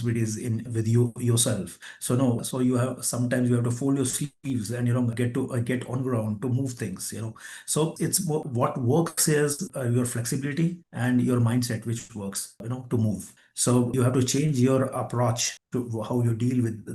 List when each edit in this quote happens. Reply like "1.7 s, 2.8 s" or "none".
none